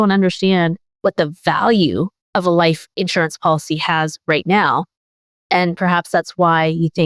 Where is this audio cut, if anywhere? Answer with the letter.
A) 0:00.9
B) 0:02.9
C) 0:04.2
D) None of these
A